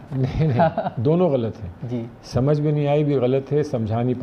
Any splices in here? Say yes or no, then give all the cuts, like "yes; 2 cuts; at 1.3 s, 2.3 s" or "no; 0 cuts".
no; 0 cuts